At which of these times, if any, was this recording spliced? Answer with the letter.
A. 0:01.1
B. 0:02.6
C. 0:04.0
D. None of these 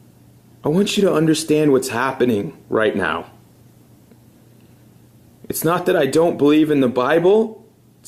D